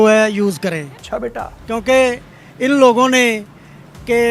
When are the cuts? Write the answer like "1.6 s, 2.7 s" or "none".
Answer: 1.1 s